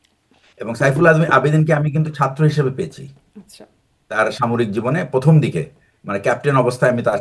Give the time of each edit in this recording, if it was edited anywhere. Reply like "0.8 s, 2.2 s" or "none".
none